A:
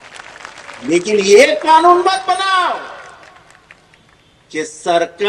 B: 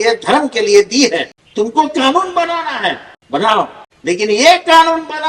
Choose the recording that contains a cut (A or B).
B